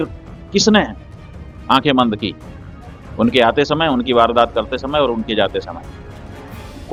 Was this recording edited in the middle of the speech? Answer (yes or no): no